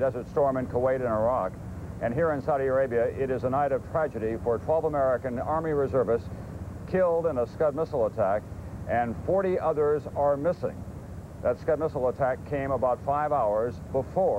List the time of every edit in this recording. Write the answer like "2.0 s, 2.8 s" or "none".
7.3 s